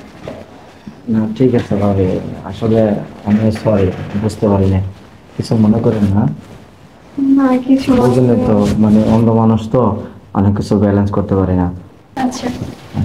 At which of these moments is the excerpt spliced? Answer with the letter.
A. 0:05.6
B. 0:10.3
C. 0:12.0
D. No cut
C